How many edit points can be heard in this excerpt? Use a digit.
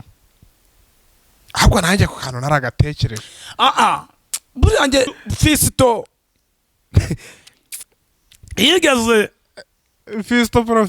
1